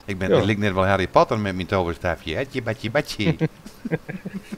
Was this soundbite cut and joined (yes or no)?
no